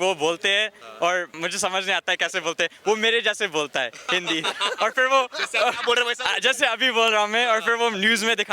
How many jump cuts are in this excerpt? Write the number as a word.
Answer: one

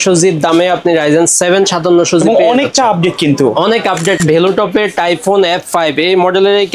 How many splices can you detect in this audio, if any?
one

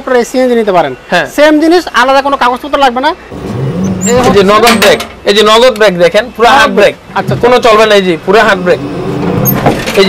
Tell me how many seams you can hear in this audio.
one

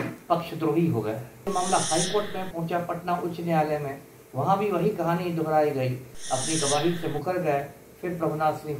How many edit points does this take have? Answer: two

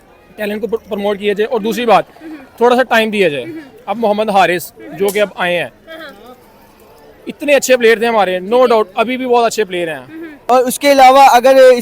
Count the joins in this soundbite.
one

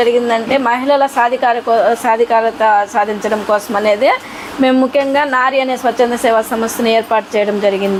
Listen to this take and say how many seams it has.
zero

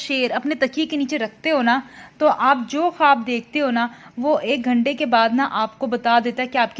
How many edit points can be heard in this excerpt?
zero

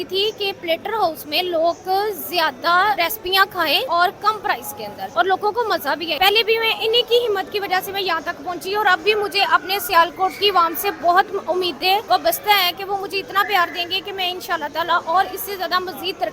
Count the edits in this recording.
four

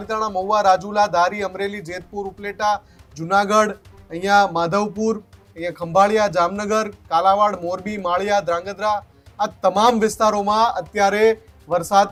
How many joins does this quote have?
zero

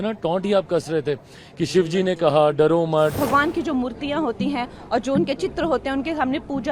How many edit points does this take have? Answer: one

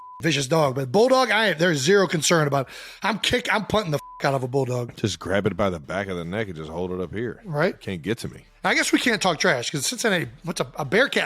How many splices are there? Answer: two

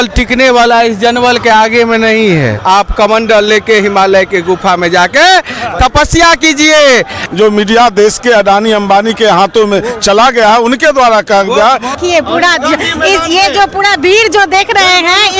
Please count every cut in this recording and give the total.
three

